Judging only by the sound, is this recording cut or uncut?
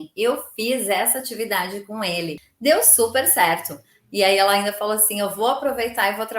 cut